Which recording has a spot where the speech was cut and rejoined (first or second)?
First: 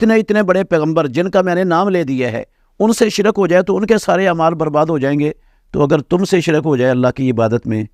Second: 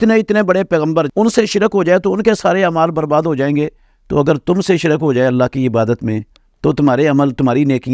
second